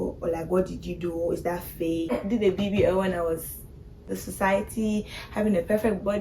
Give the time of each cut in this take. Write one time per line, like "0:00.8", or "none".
0:02.2
0:04.2